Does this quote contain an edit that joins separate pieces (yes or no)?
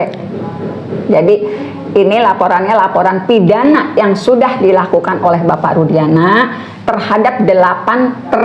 no